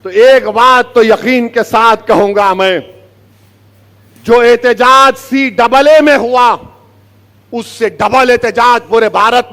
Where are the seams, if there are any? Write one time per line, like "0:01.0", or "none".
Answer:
none

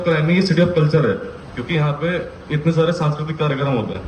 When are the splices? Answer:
none

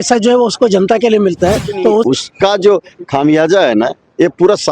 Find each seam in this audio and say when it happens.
0:02.1

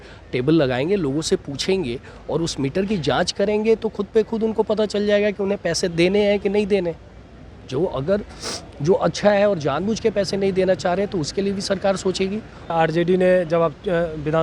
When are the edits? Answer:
0:12.7

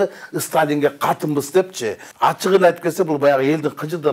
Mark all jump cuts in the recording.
0:02.0

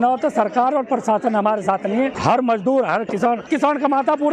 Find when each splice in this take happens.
0:02.2
0:03.5

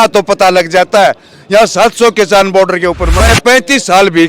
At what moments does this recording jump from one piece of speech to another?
0:03.3

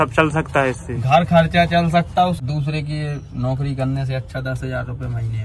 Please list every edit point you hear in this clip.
0:02.4

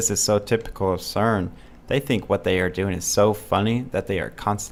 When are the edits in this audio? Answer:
none

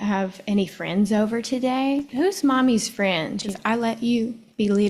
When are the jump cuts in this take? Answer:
0:02.1
0:03.5

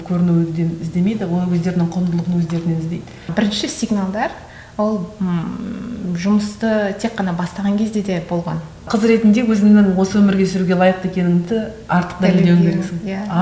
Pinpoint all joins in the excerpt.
0:03.3
0:08.9

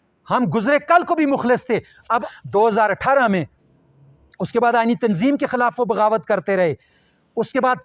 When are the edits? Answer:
0:02.3

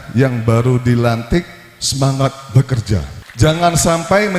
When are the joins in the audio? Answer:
0:03.2

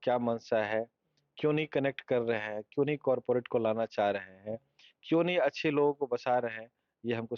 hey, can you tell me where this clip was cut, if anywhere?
none

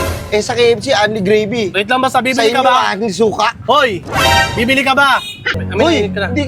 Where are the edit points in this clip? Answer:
0:05.5

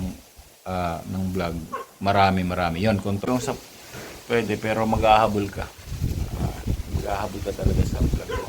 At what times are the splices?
0:03.3

